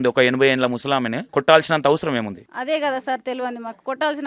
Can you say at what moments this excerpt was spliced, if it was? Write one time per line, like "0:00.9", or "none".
0:01.2
0:02.5